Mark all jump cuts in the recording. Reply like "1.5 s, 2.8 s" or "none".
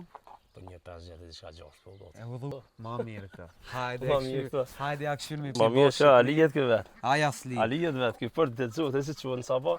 2.5 s, 5.5 s